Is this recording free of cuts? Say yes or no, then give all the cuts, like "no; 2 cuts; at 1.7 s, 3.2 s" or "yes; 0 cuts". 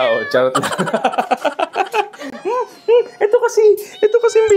yes; 0 cuts